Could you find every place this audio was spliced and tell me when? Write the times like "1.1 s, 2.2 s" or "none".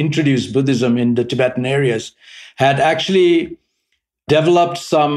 none